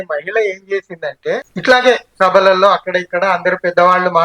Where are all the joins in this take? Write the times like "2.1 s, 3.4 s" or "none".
1.5 s